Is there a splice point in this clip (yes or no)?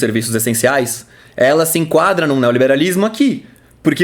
no